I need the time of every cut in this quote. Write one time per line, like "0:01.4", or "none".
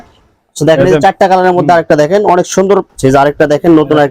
0:02.9